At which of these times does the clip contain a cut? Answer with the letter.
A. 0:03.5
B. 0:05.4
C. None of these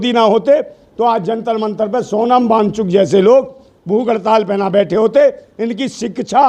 C